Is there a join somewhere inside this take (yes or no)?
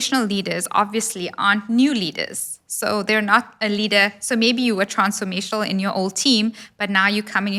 no